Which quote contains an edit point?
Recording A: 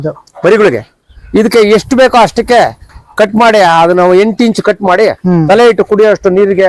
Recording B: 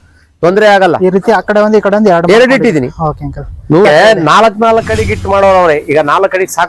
B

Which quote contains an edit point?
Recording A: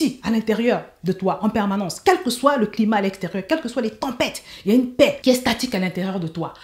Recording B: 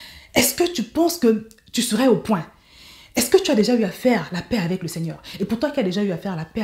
A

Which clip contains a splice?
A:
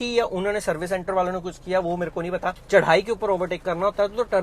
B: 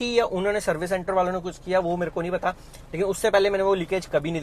A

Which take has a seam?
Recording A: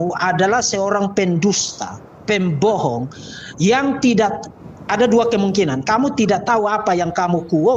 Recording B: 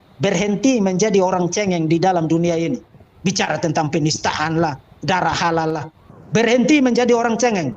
B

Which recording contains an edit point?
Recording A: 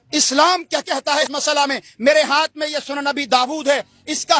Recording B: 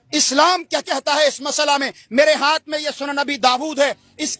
A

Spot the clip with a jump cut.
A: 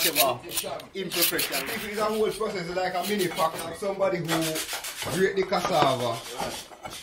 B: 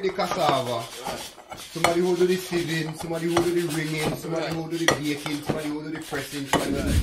A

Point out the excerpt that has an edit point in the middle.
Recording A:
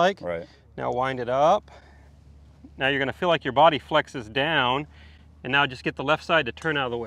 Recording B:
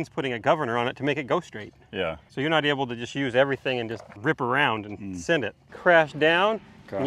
B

